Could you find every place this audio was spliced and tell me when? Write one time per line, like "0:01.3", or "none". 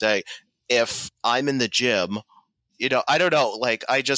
0:01.1
0:02.7